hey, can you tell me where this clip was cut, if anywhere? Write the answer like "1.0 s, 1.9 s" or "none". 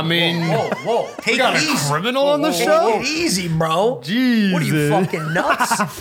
none